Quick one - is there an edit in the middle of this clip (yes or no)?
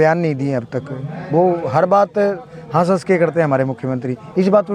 no